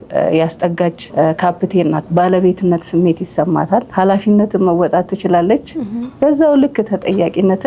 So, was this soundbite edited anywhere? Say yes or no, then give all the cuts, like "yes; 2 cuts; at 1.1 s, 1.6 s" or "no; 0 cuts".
yes; 3 cuts; at 1.0 s, 2.0 s, 3.9 s